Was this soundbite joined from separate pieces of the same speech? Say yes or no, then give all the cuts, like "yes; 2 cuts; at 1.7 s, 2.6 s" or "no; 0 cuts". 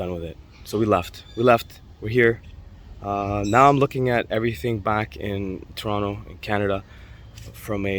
no; 0 cuts